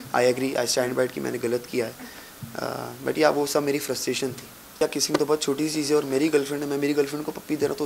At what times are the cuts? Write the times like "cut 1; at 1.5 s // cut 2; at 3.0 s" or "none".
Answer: cut 1; at 4.7 s